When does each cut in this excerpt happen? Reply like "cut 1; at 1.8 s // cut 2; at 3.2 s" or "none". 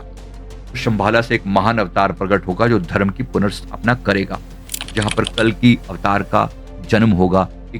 cut 1; at 4.8 s